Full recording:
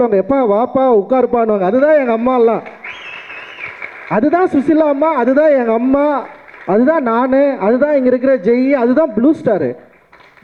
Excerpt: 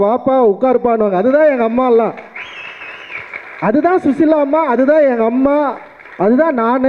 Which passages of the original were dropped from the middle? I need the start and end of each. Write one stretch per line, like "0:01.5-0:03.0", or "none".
none